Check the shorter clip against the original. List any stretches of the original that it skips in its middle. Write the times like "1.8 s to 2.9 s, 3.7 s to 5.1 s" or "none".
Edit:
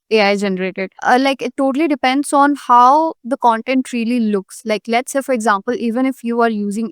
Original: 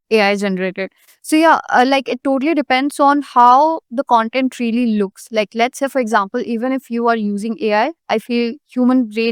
1.0 s to 1.7 s

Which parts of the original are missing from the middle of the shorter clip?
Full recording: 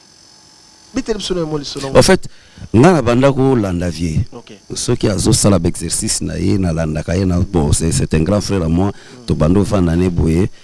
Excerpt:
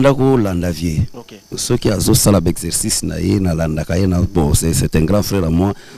none

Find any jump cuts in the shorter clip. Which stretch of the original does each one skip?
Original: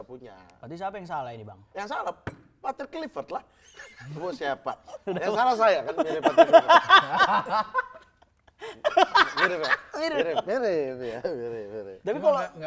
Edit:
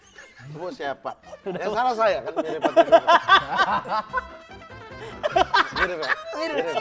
none

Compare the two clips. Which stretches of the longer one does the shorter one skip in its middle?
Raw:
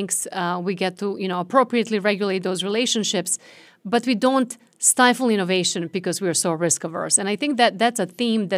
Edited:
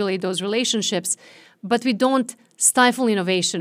none

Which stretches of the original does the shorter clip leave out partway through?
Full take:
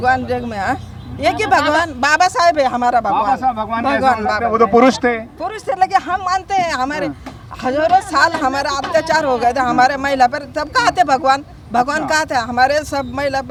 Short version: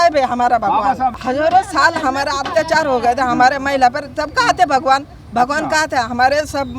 3.6 s to 7.6 s

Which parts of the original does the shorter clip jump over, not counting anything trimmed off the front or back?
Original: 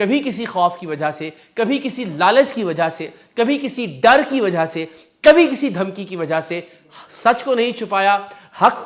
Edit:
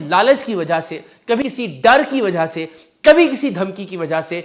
3.5 s to 3.6 s

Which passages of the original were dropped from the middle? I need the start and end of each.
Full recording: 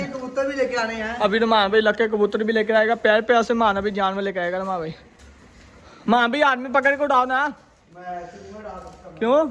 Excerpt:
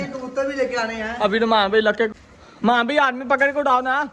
2.1 s to 5.5 s

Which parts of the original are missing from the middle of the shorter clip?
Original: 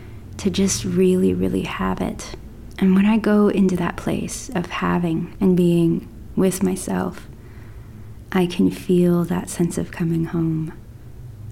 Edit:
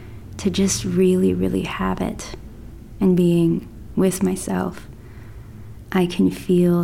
2.8 s to 5.2 s

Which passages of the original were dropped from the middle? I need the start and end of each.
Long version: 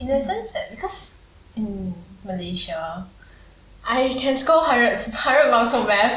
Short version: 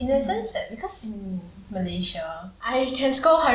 1.1 s to 1.6 s, 3.0 s to 3.7 s

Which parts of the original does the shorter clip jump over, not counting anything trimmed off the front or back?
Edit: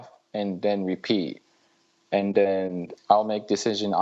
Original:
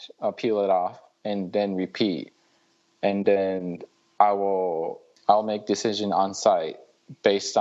3.8 s to 5.1 s

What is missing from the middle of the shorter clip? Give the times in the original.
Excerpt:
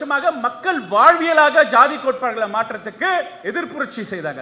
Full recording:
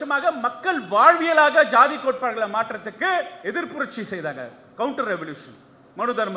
none

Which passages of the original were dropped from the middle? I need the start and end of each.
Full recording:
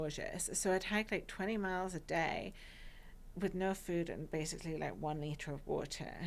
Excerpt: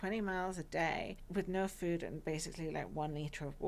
2.5 s to 3.2 s

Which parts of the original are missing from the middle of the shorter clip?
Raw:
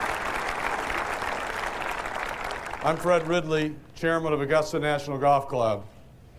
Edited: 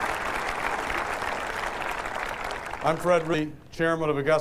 3.3 s to 3.6 s

